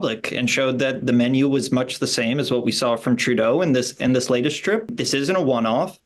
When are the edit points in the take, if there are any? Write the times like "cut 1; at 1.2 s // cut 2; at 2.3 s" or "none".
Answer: cut 1; at 4.9 s